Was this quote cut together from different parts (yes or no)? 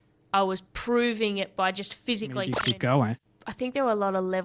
yes